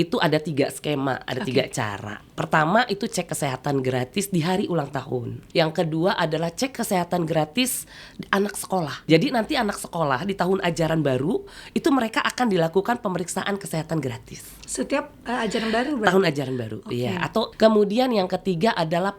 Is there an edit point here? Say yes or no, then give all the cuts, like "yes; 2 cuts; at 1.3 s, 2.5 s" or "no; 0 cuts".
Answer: yes; 3 cuts; at 5.4 s, 9.0 s, 17.5 s